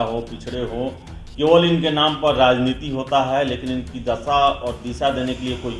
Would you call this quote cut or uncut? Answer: uncut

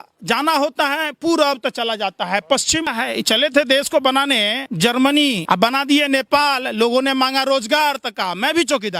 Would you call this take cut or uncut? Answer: cut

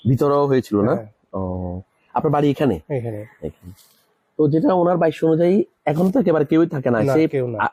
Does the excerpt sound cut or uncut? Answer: uncut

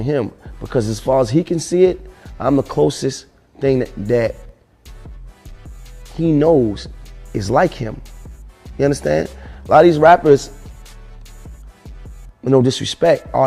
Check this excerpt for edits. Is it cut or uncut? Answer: cut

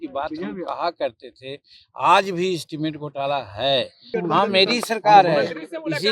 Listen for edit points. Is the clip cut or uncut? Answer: cut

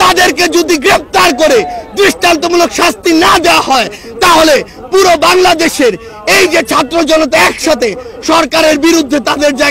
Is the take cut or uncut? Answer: uncut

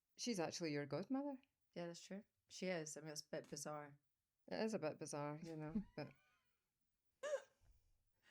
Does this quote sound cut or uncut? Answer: cut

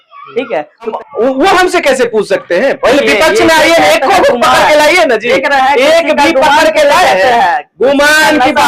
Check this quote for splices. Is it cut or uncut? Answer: cut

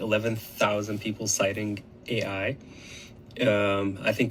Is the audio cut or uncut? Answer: uncut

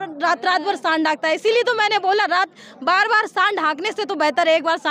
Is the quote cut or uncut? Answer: uncut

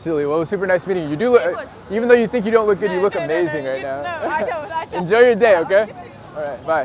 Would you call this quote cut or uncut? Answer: uncut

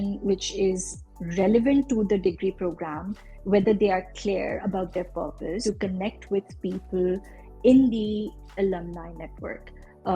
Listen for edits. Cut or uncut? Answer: cut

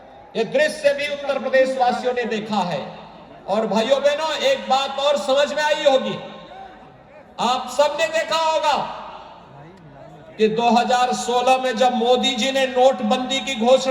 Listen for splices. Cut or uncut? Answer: uncut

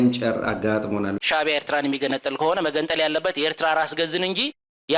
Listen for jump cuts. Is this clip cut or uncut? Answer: cut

